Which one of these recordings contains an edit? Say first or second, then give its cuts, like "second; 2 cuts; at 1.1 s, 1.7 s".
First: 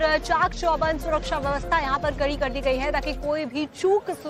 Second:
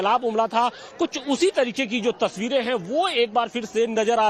second; 1 cut; at 2.7 s